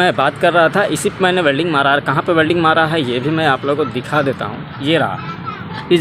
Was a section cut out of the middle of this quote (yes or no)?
no